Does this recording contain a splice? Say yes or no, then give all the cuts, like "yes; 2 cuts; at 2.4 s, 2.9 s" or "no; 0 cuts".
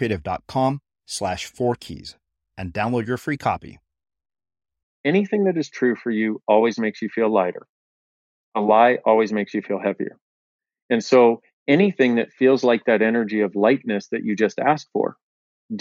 yes; 1 cut; at 4.9 s